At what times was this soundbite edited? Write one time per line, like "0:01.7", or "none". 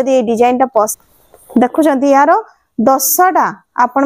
0:00.9